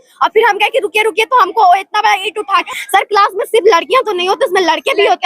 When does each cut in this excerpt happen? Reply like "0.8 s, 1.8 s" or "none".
2.6 s